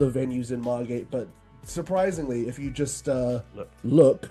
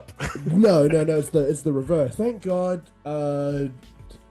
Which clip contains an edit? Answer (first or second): second